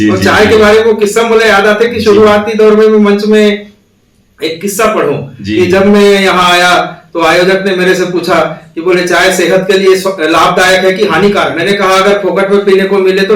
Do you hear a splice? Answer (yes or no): no